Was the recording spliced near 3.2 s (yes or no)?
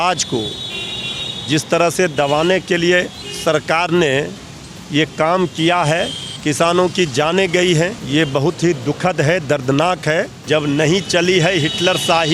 yes